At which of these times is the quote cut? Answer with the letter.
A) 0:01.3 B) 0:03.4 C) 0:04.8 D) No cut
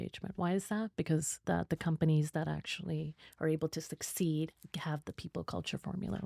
A